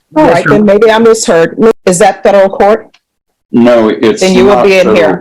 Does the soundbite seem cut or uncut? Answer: cut